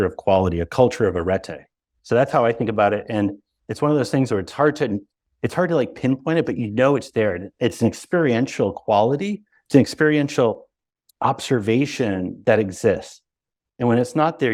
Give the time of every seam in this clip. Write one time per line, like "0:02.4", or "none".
none

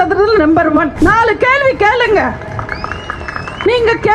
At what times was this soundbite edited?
0:00.9

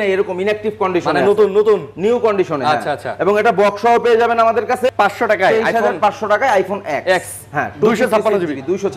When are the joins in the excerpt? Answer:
0:04.9

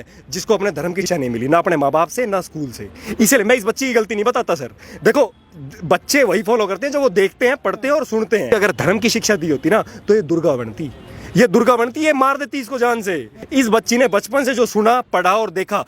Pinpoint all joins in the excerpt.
0:01.1
0:08.5
0:13.3

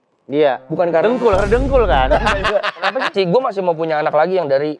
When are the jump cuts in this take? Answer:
0:03.1

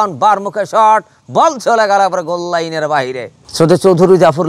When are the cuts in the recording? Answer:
0:03.4

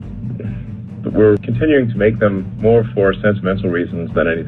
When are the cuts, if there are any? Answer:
0:01.5

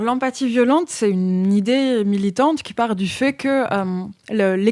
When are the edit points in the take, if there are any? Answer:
0:00.9

